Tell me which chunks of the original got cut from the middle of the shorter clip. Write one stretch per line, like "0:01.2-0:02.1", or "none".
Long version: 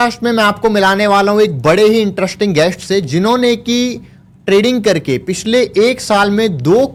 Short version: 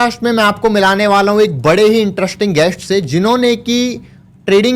none